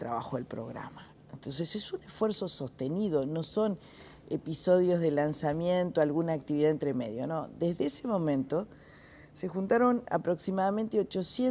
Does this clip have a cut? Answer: no; 0 cuts

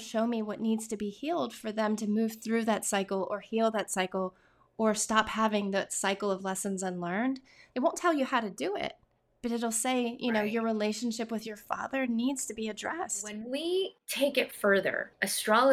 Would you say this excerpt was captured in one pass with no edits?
no; 2 cuts; at 7.6 s, 13.4 s

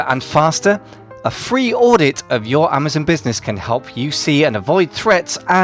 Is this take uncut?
yes; 0 cuts

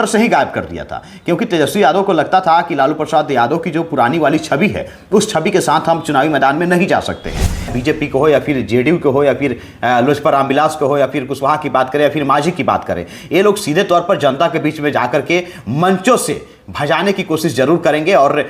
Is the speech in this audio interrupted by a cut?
yes; 1 cut; at 7.8 s

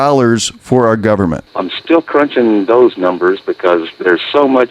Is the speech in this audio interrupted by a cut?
yes; 1 cut; at 1.5 s

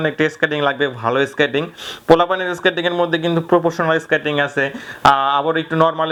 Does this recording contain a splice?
no; 0 cuts

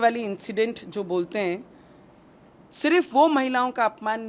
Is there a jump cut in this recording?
no; 0 cuts

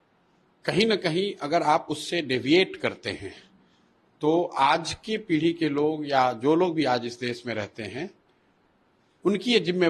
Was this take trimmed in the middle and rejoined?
no; 0 cuts

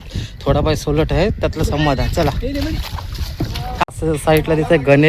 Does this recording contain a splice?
yes; 1 cut; at 3.8 s

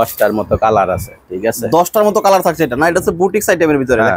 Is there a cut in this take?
no; 0 cuts

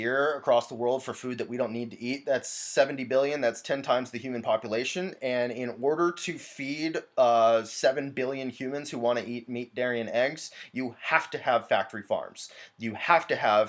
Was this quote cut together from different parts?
no; 0 cuts

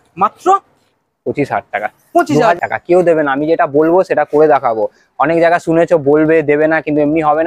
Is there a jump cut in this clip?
yes; 1 cut; at 2.6 s

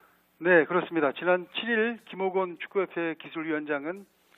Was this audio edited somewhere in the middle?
yes; 1 cut; at 2.7 s

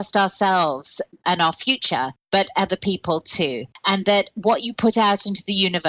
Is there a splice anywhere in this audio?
yes; 2 cuts; at 2.2 s, 3.7 s

